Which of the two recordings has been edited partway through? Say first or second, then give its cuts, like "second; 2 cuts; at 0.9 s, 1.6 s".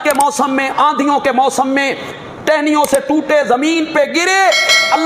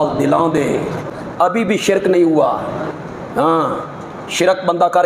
second; 1 cut; at 1.1 s